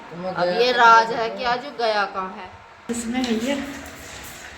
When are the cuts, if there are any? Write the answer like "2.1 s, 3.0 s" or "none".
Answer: 2.9 s